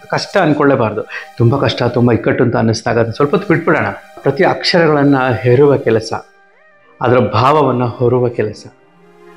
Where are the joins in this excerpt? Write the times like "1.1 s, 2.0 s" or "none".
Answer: 4.1 s